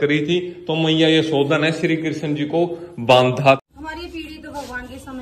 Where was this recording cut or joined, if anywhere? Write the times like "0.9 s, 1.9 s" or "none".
3.6 s